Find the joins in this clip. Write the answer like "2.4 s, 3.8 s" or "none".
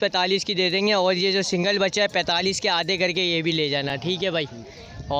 none

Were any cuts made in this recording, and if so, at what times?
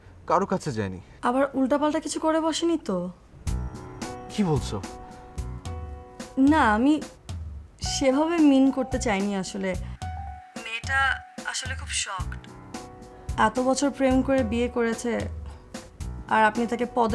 1.0 s

